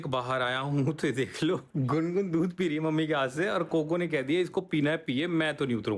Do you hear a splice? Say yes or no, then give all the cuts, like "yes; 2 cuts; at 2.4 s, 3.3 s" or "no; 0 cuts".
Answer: no; 0 cuts